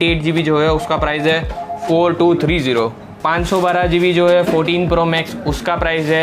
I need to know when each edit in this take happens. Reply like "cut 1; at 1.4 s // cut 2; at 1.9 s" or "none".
cut 1; at 3.1 s